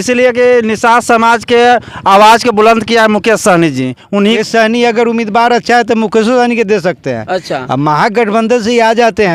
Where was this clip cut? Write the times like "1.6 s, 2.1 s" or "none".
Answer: 4.4 s